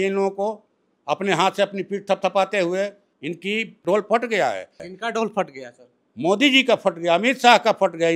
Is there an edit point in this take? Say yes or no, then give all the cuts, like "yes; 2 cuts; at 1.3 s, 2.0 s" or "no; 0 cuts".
yes; 2 cuts; at 3.6 s, 4.9 s